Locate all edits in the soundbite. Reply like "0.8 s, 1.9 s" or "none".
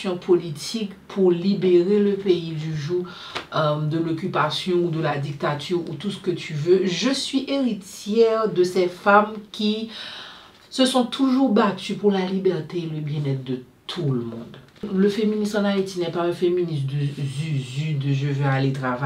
14.9 s